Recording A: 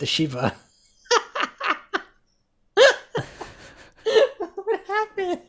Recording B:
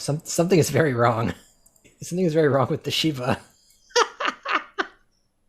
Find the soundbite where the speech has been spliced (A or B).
B